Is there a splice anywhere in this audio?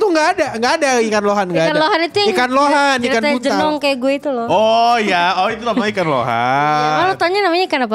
no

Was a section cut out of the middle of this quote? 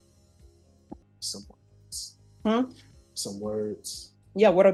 no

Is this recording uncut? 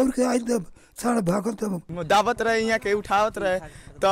no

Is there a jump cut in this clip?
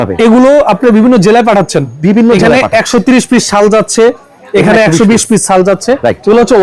no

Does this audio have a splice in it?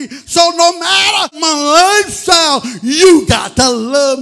yes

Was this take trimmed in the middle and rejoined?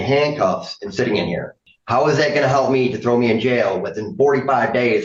no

